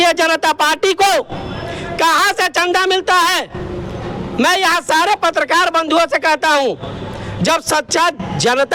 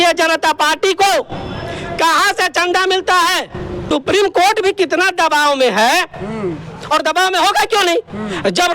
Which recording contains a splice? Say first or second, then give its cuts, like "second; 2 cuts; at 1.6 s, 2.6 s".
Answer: second; 1 cut; at 3.9 s